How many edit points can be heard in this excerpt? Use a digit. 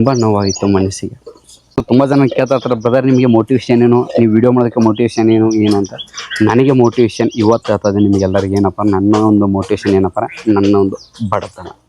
1